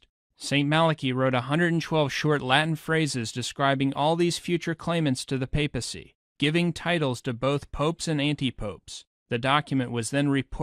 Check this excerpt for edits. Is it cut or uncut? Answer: cut